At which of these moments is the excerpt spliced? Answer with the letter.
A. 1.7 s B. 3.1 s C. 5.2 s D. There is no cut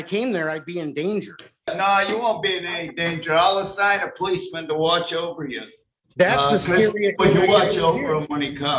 A